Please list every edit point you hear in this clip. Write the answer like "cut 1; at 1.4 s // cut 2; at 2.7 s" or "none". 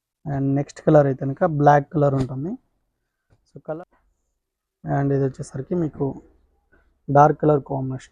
cut 1; at 3.8 s